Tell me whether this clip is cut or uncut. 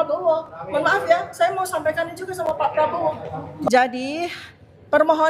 uncut